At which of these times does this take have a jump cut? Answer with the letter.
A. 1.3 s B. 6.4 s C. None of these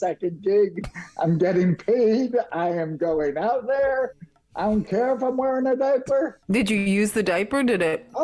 B